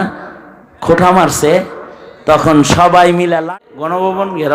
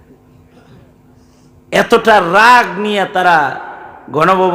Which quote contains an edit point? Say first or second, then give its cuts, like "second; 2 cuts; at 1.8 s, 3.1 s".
first; 1 cut; at 3.4 s